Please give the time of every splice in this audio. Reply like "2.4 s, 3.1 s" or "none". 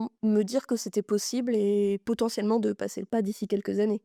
none